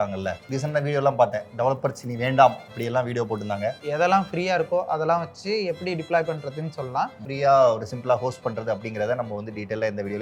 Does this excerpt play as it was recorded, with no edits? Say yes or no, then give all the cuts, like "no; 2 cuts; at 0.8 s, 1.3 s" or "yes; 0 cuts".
no; 2 cuts; at 3.8 s, 7.2 s